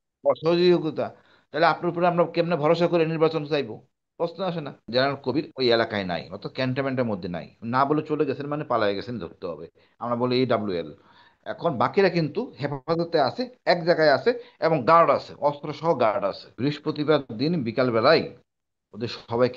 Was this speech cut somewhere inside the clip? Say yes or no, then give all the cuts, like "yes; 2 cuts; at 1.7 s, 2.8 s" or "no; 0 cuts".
yes; 2 cuts; at 4.9 s, 16.5 s